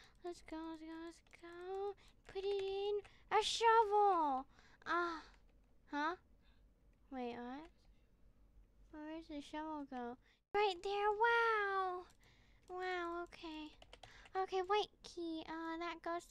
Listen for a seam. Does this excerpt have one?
yes; 1 cut; at 10.5 s

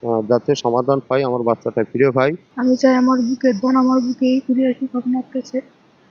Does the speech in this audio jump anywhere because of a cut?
yes; 1 cut; at 2.4 s

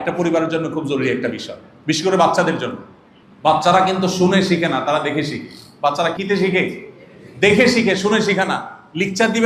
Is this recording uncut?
no; 1 cut; at 6.1 s

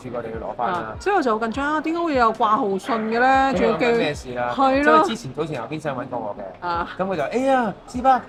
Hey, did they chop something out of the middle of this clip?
no; 0 cuts

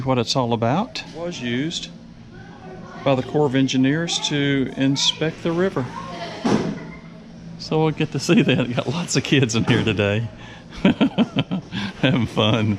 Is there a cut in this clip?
yes; 1 cut; at 1.3 s

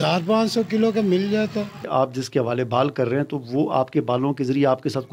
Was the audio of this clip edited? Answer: yes; 1 cut; at 1.8 s

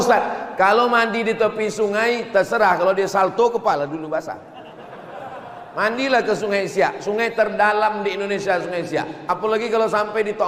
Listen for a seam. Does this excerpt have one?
no; 0 cuts

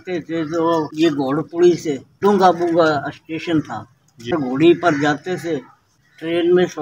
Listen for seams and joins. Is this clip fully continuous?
no; 4 cuts; at 0.9 s, 2.1 s, 4.3 s, 5.8 s

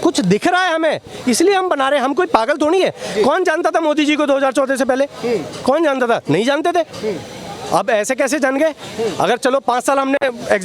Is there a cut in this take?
no; 0 cuts

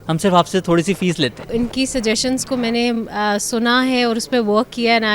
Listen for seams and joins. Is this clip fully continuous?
no; 1 cut; at 1.5 s

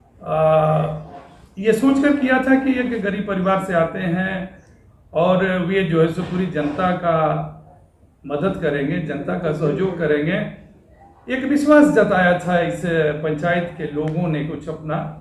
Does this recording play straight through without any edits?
yes; 0 cuts

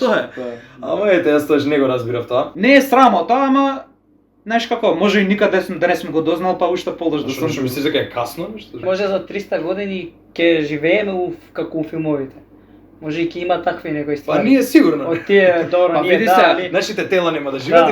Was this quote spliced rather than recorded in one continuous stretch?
yes; 2 cuts; at 2.5 s, 8.8 s

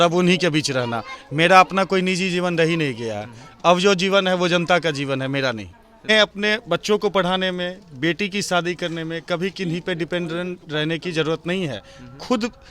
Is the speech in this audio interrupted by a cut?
yes; 1 cut; at 6.1 s

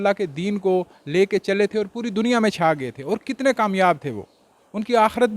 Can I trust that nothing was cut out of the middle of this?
yes; 0 cuts

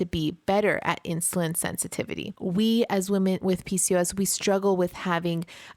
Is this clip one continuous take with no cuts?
no; 2 cuts; at 2.3 s, 3.4 s

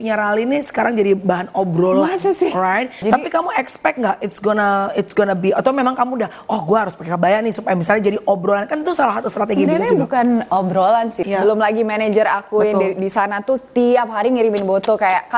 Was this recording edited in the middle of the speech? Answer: yes; 2 cuts; at 3.0 s, 11.2 s

